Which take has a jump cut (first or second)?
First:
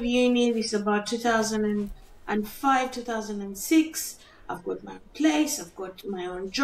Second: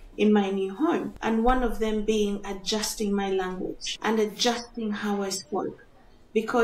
second